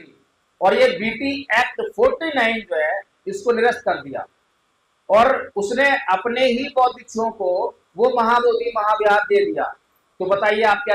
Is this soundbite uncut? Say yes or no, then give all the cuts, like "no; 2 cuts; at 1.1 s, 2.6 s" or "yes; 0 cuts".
yes; 0 cuts